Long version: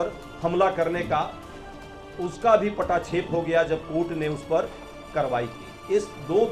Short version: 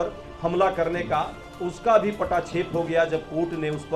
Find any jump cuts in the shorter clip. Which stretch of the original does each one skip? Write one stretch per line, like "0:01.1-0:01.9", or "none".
0:01.4-0:02.0